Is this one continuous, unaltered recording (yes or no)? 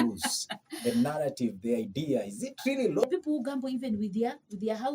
no